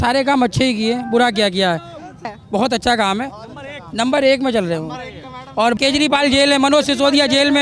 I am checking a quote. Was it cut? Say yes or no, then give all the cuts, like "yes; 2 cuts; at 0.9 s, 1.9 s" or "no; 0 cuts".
yes; 2 cuts; at 2.4 s, 5.8 s